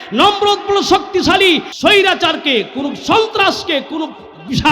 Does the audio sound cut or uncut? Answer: cut